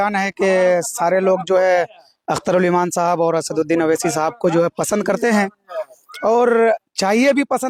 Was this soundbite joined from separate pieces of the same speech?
no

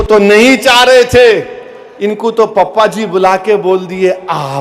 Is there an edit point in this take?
no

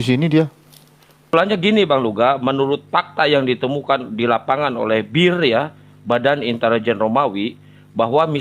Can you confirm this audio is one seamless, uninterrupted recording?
no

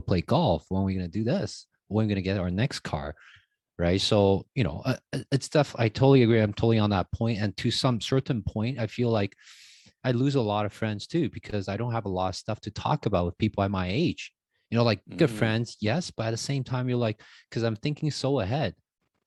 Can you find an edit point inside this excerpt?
no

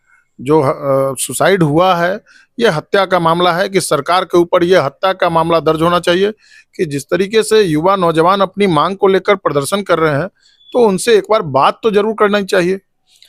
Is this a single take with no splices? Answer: yes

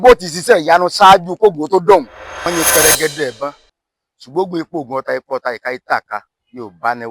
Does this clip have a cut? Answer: yes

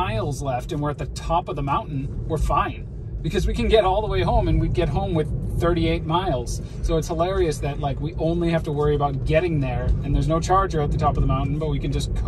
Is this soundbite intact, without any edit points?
yes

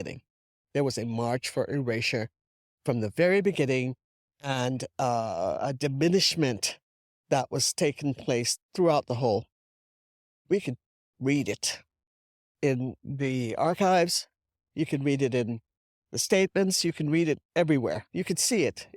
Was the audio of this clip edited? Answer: yes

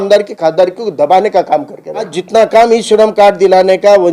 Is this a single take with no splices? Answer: no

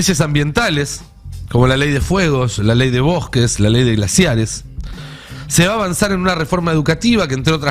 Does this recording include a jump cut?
no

